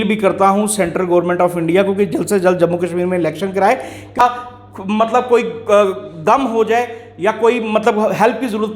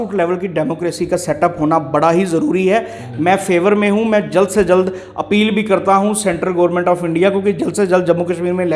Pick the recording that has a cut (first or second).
first